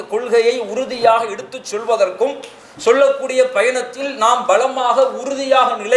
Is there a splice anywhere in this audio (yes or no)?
no